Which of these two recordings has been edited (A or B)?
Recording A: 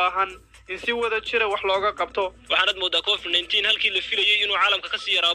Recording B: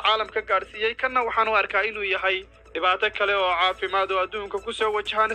A